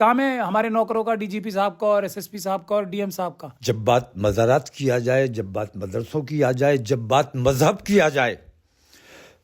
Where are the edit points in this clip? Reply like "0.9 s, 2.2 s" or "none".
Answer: 3.5 s

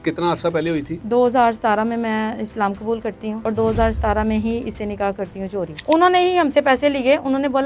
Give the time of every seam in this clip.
1.0 s, 3.4 s, 5.8 s

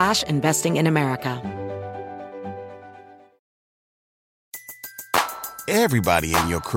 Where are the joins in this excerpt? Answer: 1.4 s

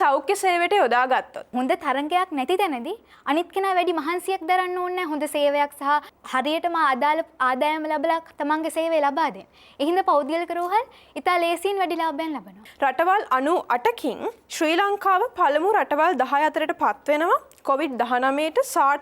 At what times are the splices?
1.5 s, 6.2 s, 12.6 s

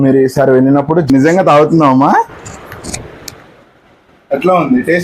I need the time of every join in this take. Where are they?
1.1 s

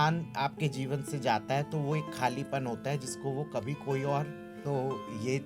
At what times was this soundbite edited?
4.5 s

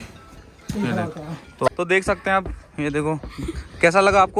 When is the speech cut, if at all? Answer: 1.6 s

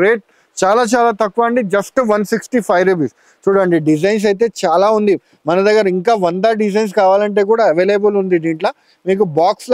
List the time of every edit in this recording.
none

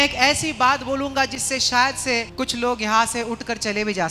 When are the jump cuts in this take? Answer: 2.3 s

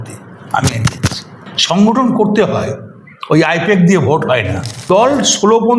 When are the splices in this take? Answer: 4.8 s

